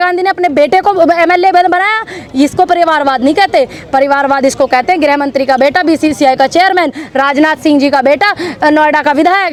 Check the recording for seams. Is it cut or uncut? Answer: uncut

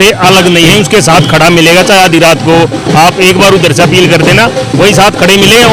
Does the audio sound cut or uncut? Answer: uncut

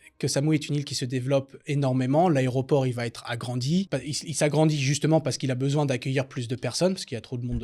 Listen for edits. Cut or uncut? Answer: cut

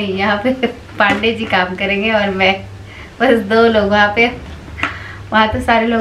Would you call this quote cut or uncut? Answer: uncut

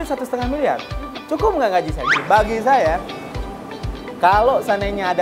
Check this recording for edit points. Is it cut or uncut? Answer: cut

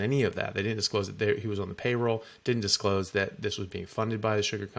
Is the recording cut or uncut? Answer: uncut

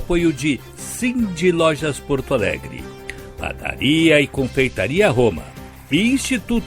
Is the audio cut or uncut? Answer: uncut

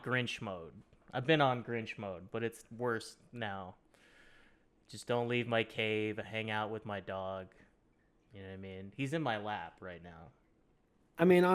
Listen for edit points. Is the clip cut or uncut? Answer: uncut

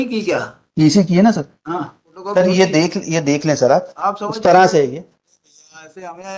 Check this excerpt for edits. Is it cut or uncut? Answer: cut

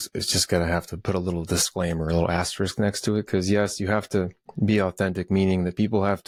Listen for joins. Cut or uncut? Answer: uncut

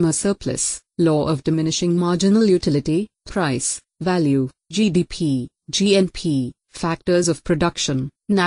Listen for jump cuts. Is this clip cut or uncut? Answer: uncut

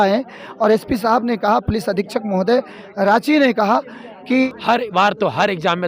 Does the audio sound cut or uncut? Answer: cut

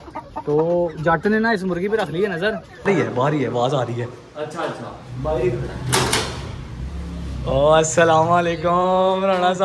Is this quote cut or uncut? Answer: cut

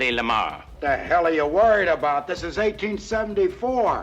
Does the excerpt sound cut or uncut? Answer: uncut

